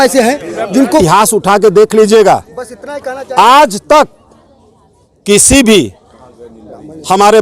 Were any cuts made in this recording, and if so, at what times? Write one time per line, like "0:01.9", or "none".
0:01.0